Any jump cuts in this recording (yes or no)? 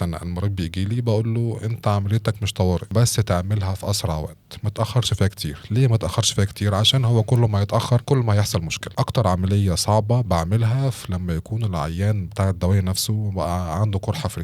yes